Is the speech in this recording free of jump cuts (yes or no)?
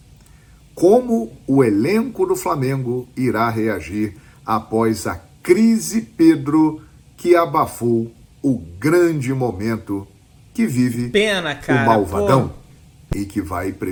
yes